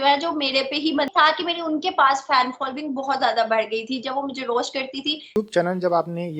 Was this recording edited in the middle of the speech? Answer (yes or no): yes